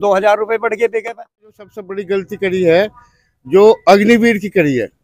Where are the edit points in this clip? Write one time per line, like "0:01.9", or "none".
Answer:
0:01.7

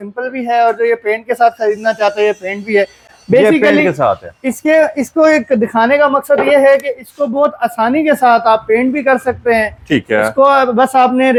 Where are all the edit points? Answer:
none

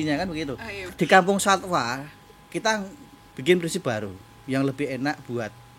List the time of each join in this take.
0:00.9

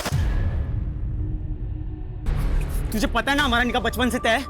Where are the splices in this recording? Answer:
0:02.2

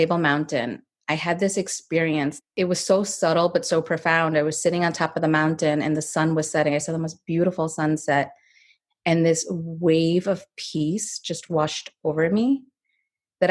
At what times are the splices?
0:02.4

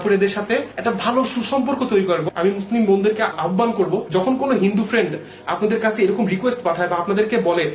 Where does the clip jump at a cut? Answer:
0:02.2

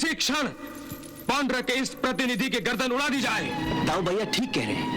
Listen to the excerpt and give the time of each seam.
0:03.5

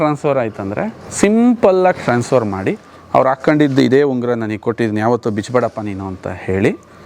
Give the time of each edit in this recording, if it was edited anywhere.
0:01.0

